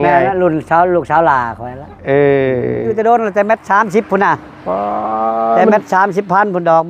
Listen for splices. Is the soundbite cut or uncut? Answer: cut